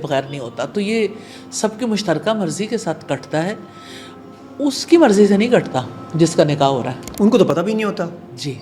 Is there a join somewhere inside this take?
no; 0 cuts

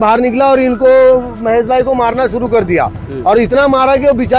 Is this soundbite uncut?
yes; 0 cuts

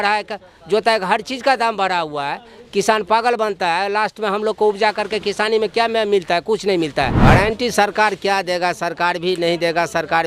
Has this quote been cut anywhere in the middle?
yes; 1 cut; at 7.1 s

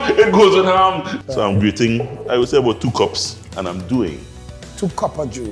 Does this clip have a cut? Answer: yes; 1 cut; at 1.1 s

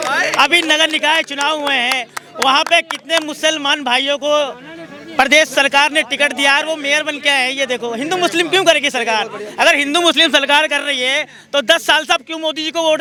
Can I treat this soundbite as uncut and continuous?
yes; 0 cuts

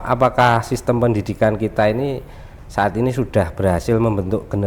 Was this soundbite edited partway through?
no; 0 cuts

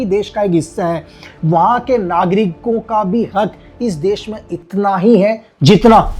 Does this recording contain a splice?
no; 0 cuts

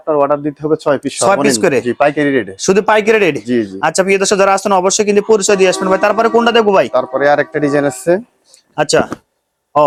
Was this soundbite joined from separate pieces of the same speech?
no; 0 cuts

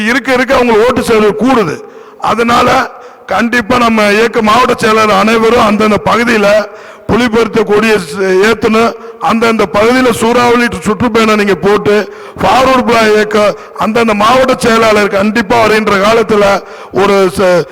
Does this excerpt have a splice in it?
no; 0 cuts

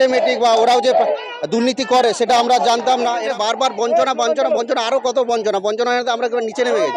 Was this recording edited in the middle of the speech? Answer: yes; 1 cut; at 3.3 s

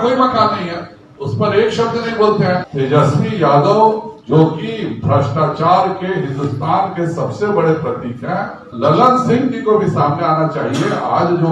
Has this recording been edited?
yes; 2 cuts; at 2.7 s, 8.7 s

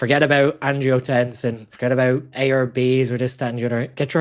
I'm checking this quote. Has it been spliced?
yes; 1 cut; at 1.7 s

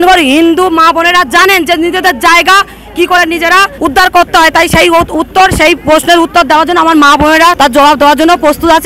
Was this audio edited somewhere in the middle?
yes; 1 cut; at 7.6 s

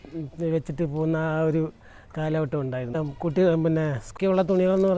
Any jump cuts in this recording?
yes; 2 cuts; at 3.0 s, 4.1 s

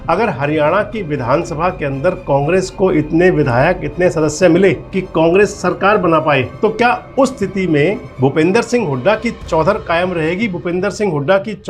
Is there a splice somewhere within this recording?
yes; 3 cuts; at 4.9 s, 6.5 s, 8.1 s

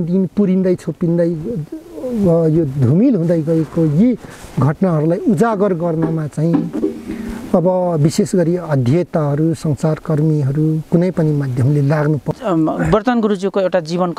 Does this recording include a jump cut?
yes; 1 cut; at 12.3 s

